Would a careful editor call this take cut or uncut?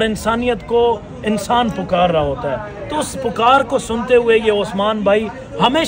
uncut